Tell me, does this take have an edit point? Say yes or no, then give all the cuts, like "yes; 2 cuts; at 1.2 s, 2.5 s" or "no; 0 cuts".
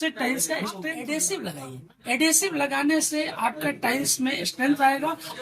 yes; 1 cut; at 0.9 s